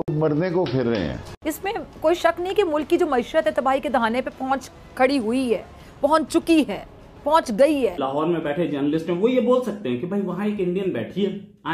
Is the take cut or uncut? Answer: cut